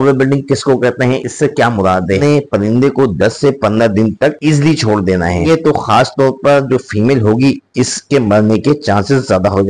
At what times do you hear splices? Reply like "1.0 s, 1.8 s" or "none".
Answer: 2.2 s, 5.5 s